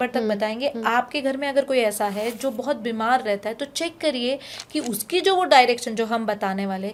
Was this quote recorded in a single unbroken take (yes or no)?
yes